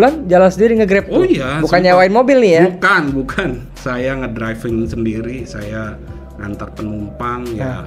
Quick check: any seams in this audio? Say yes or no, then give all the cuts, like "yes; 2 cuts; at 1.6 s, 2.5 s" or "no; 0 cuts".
no; 0 cuts